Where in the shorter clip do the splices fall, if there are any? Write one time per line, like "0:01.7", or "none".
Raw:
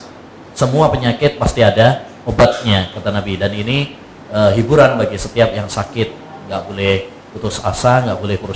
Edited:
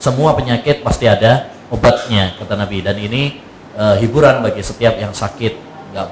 none